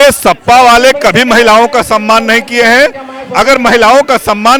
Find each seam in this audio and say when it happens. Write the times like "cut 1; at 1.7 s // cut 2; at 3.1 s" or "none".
none